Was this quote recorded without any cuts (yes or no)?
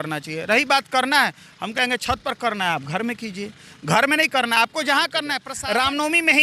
no